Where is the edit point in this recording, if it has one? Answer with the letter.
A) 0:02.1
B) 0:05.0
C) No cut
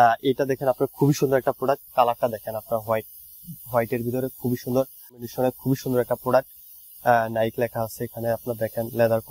B